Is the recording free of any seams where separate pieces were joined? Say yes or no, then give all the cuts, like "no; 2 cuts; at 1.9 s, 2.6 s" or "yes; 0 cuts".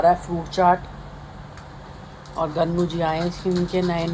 yes; 0 cuts